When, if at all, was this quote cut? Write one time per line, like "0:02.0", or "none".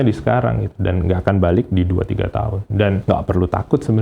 0:01.2
0:02.9

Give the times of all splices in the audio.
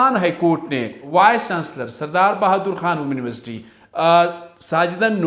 0:00.9

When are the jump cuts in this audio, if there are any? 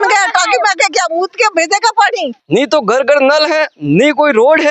0:02.3

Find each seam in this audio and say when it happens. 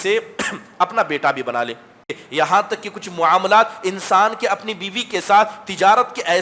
0:02.1

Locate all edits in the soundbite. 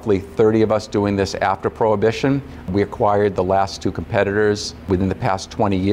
0:04.7

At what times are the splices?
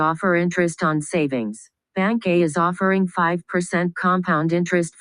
none

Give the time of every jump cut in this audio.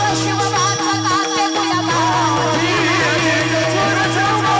none

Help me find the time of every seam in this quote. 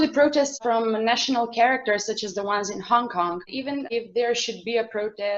0:03.4

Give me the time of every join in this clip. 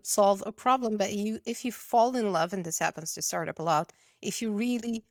none

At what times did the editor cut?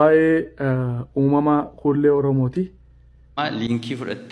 0:03.3

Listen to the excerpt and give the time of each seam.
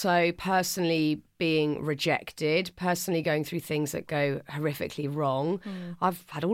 none

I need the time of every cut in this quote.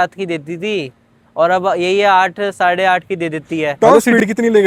0:03.7

